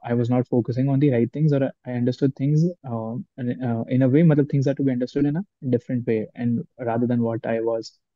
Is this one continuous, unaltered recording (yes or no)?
yes